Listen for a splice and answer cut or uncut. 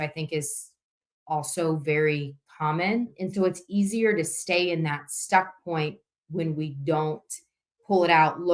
uncut